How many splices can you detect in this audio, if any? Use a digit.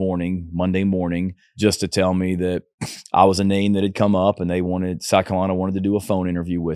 1